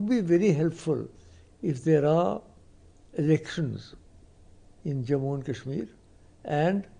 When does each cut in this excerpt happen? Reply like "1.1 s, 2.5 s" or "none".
none